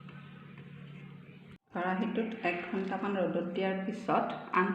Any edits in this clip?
yes; 1 cut; at 1.6 s

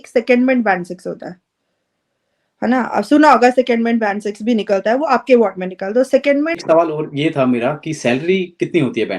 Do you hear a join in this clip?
yes; 1 cut; at 6.6 s

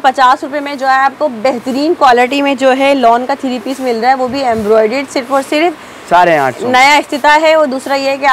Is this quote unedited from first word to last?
yes; 0 cuts

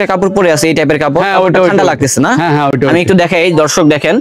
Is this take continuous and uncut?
yes; 0 cuts

